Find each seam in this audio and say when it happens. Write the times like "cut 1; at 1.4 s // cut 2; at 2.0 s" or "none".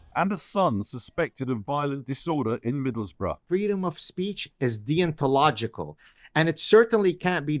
cut 1; at 3.4 s